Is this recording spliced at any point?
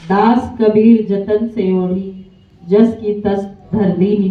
no; 0 cuts

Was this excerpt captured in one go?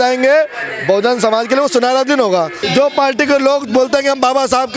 no; 1 cut; at 2.6 s

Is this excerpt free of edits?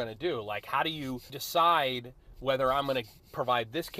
no; 1 cut; at 1.4 s

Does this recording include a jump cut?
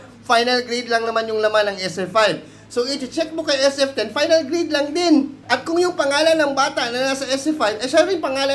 yes; 1 cut; at 5.4 s

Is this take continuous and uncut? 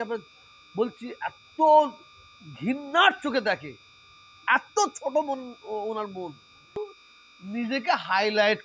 no; 1 cut; at 6.8 s

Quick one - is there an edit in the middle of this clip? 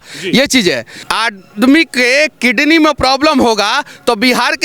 yes; 1 cut; at 0.9 s

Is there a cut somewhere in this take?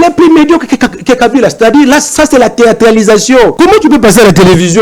yes; 1 cut; at 3.5 s

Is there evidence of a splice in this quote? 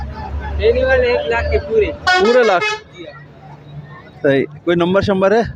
no; 0 cuts

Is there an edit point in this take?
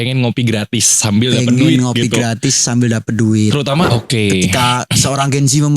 yes; 1 cut; at 3.9 s

